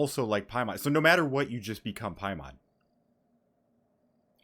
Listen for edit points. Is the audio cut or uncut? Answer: uncut